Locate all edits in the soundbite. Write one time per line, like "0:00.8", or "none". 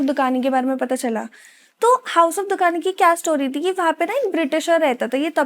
none